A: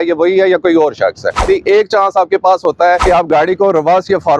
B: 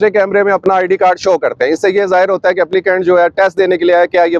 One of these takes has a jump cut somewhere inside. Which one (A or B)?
A